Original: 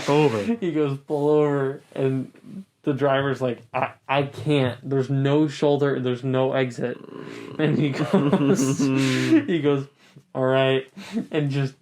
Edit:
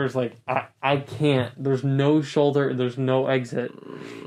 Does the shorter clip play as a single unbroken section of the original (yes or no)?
yes